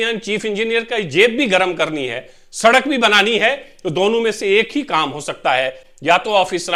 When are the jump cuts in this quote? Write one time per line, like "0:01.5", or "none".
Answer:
none